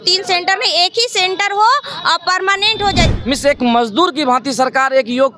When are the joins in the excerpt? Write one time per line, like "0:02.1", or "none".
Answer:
0:03.1